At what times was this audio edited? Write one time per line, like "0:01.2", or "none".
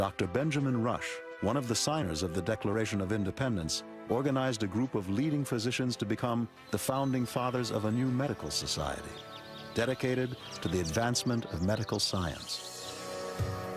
none